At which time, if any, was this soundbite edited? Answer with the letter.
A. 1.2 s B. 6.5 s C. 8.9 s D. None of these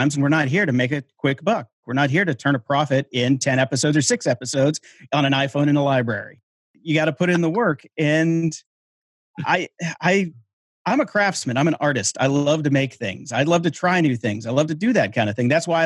B